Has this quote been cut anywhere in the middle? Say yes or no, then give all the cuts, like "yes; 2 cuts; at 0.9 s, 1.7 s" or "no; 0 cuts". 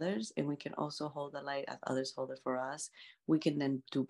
no; 0 cuts